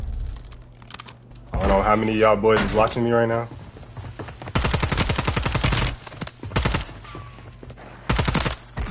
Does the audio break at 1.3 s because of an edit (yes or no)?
yes